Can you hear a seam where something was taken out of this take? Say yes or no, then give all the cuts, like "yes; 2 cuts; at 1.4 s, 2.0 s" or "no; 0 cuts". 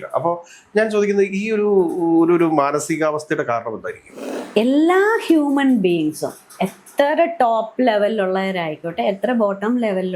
no; 0 cuts